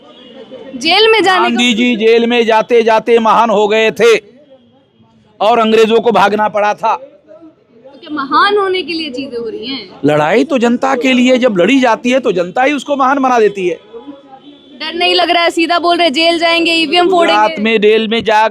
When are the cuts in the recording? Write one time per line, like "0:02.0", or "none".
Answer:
none